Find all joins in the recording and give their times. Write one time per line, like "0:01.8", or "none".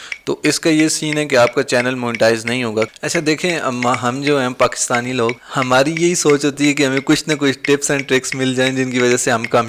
0:02.9
0:05.4

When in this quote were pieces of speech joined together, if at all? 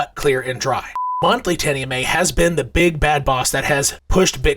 0:01.1

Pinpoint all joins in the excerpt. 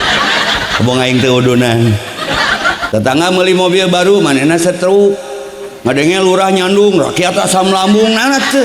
0:02.9

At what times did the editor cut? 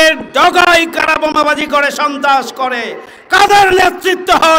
none

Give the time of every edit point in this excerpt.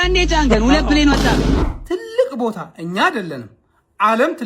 0:01.6

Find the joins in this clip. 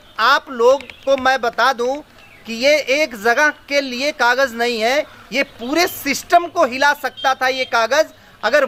none

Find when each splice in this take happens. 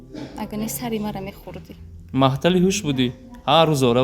none

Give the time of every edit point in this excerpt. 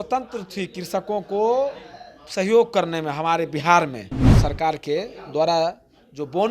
0:04.4

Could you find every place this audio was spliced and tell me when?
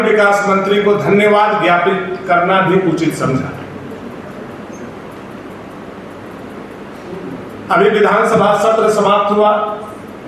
none

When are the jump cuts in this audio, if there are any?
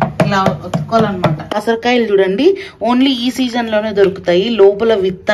0:01.6

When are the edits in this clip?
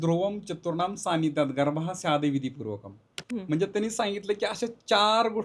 none

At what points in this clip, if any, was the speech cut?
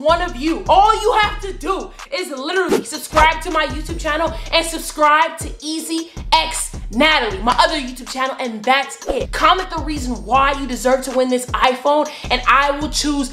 none

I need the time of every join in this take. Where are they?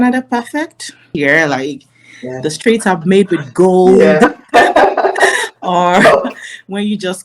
0:01.1

